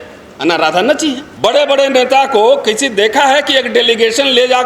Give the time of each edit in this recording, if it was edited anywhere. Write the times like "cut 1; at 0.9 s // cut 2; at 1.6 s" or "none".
cut 1; at 1.3 s